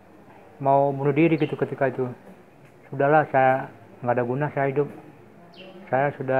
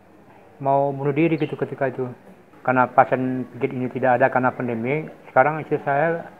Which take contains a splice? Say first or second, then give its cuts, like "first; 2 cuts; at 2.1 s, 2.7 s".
second; 1 cut; at 2.4 s